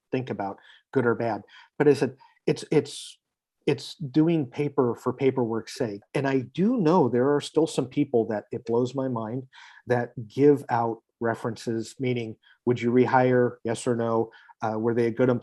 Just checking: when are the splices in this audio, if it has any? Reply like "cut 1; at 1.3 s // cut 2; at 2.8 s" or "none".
cut 1; at 6.1 s